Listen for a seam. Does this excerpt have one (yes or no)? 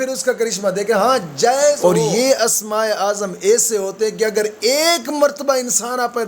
yes